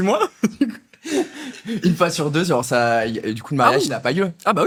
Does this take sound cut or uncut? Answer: uncut